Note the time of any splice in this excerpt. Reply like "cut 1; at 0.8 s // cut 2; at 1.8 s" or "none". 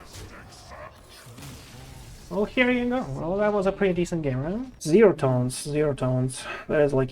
cut 1; at 4.7 s